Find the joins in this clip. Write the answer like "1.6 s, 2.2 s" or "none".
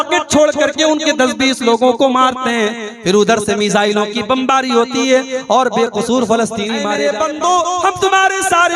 6.9 s